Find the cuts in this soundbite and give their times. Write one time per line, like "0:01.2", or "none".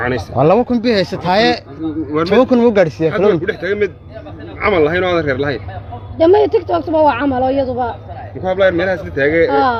none